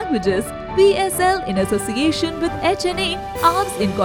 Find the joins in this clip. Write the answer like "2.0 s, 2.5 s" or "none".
none